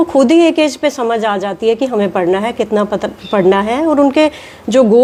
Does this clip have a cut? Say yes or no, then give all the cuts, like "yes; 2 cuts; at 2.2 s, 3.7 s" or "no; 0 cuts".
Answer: no; 0 cuts